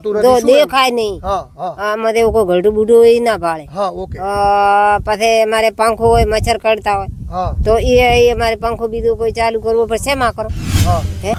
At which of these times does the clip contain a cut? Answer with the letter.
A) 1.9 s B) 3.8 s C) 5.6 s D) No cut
D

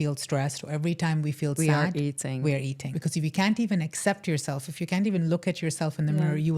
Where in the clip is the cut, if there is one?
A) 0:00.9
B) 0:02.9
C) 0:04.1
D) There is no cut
B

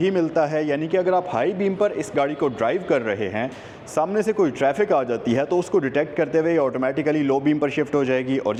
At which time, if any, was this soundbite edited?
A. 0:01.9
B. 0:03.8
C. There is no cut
C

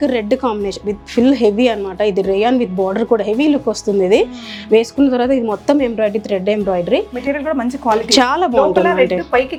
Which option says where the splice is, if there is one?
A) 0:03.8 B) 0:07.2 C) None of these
C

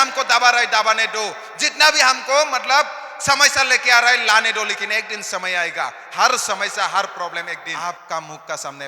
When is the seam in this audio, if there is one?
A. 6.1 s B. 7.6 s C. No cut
B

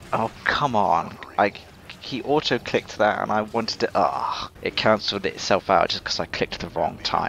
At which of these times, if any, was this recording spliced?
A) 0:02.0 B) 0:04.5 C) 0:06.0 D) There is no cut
B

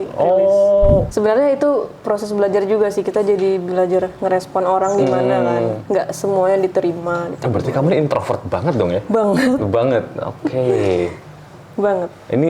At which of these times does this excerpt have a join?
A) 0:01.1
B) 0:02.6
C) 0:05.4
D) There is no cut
A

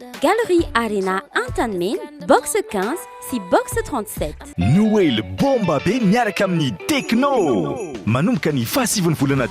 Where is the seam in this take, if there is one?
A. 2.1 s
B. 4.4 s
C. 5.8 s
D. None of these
B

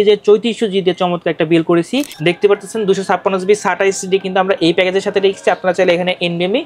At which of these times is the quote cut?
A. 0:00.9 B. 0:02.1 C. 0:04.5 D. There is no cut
B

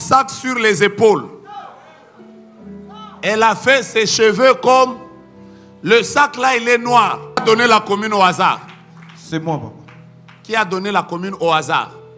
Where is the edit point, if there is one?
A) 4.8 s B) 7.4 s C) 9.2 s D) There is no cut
B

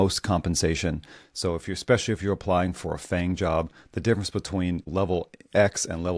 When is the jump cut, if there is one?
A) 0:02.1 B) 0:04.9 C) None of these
B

